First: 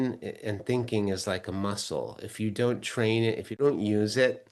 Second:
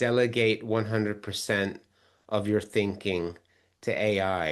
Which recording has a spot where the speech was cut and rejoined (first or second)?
first